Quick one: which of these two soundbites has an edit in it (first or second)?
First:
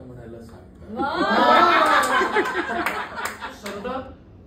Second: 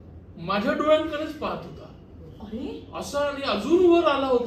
first